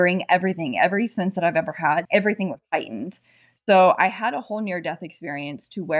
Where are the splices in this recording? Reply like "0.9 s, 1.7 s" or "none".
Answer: 2.0 s